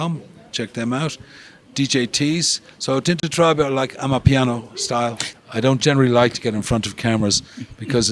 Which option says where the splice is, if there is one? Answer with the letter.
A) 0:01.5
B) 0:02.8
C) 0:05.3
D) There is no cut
C